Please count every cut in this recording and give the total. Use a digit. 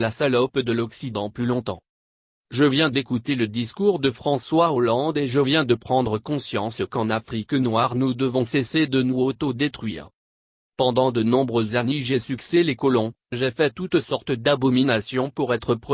1